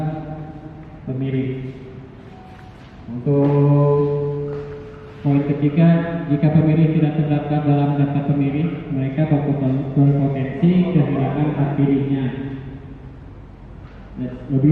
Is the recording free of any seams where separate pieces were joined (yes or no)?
yes